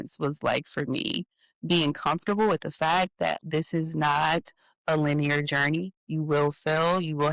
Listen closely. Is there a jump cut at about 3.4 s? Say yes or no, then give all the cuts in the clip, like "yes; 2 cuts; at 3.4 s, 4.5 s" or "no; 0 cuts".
yes; 1 cut; at 3.4 s